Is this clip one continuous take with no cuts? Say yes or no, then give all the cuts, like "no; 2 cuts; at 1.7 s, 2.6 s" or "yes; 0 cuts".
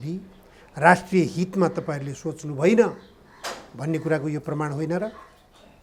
yes; 0 cuts